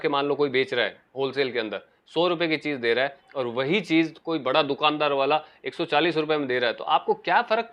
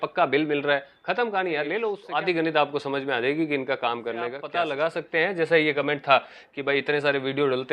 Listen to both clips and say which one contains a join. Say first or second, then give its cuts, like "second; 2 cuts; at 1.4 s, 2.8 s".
second; 2 cuts; at 2.0 s, 4.5 s